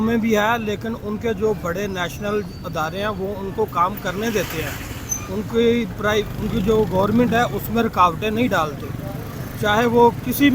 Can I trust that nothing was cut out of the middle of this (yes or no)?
yes